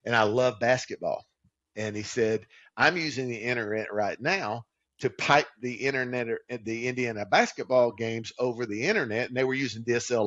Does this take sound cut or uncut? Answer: uncut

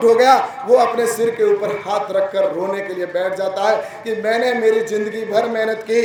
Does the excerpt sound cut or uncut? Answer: uncut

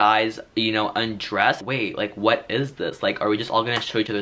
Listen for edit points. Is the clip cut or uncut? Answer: cut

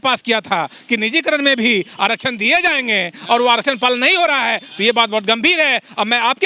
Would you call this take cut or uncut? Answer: uncut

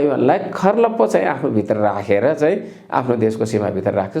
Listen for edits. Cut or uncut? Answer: uncut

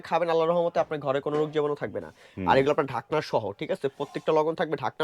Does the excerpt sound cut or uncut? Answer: uncut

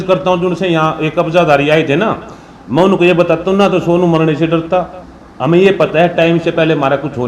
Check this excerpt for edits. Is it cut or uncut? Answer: uncut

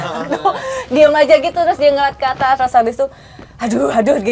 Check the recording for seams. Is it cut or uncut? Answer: uncut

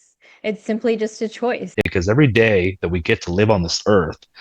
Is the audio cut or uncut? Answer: cut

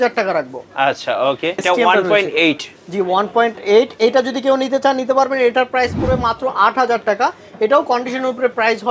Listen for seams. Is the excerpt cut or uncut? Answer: cut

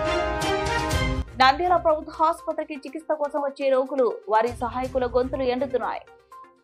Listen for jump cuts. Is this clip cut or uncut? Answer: uncut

